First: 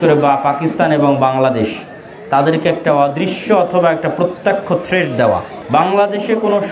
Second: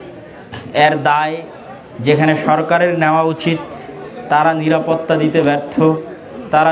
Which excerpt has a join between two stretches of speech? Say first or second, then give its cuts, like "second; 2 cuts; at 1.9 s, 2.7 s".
first; 1 cut; at 5.5 s